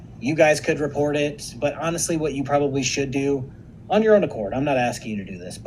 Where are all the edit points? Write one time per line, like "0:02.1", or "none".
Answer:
0:01.4